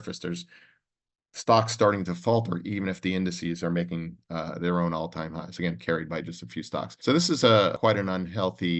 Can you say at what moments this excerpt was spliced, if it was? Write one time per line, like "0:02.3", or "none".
0:06.9
0:07.8